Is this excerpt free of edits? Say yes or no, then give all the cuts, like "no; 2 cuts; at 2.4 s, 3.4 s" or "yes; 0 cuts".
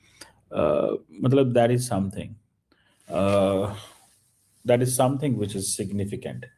yes; 0 cuts